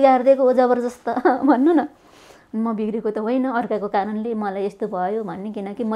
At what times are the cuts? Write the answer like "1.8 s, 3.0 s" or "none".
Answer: none